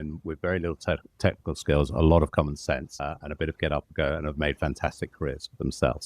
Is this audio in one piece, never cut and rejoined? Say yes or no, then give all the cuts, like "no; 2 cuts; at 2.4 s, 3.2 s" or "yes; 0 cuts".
no; 1 cut; at 3.0 s